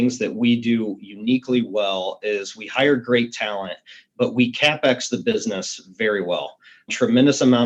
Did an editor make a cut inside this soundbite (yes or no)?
no